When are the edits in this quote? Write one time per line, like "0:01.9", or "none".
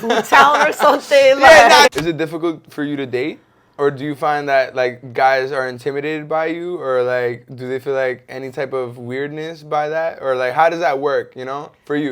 0:01.9